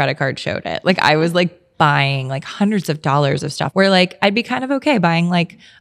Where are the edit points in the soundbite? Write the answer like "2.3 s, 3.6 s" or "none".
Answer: 3.6 s

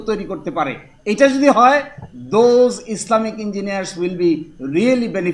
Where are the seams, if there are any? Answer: none

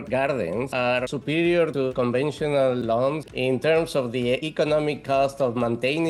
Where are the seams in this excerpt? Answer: 1.9 s, 3.2 s, 4.5 s

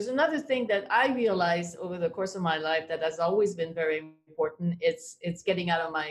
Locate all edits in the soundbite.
none

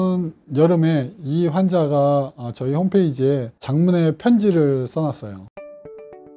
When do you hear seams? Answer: 5.5 s

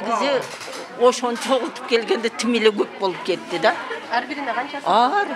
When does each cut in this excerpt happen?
none

